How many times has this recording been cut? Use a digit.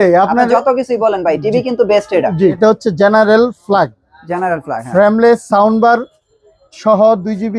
1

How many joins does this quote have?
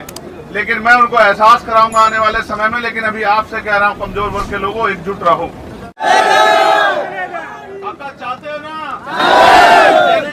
1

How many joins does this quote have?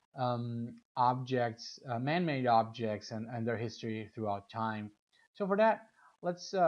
1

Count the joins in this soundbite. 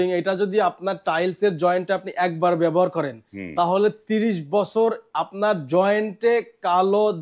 0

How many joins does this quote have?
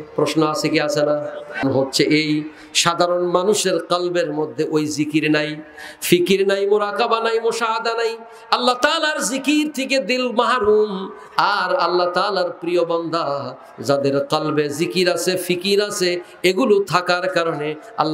1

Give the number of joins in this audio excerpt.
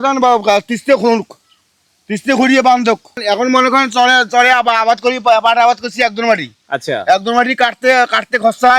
0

